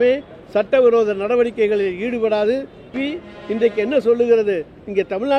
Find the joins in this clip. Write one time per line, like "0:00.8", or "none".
0:02.9